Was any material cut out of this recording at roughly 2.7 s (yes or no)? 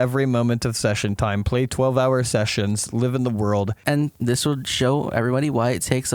no